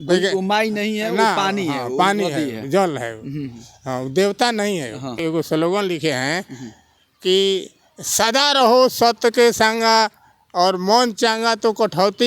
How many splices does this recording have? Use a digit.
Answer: 1